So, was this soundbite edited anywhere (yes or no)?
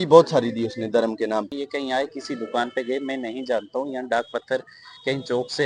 yes